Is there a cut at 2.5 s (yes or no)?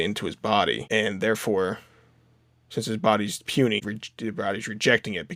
no